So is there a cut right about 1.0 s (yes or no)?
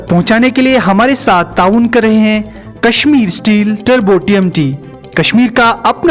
no